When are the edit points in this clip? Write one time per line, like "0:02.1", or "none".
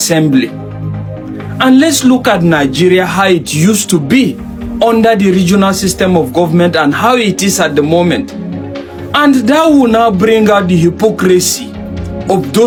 none